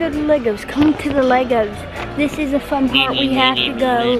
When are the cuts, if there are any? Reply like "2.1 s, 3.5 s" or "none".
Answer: none